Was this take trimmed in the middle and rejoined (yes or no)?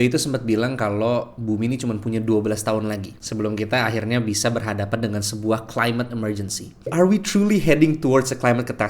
yes